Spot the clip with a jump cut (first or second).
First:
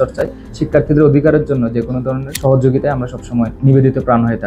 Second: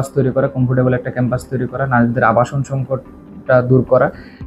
first